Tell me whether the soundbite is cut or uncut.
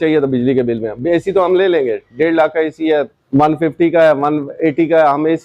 cut